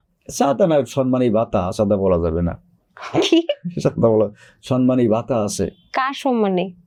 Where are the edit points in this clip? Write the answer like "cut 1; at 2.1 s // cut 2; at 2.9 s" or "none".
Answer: none